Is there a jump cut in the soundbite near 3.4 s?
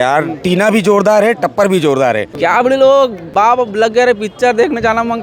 yes; 2 cuts; at 2.3 s, 3.4 s

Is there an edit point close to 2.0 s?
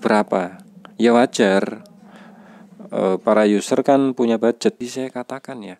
no; 1 cut; at 4.8 s

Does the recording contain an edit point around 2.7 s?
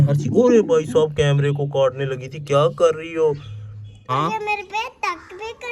no; 1 cut; at 3.9 s

